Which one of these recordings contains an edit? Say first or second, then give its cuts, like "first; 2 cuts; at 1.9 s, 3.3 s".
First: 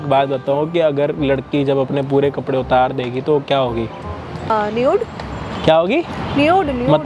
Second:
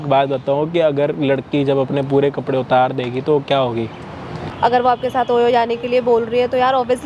second; 1 cut; at 4.3 s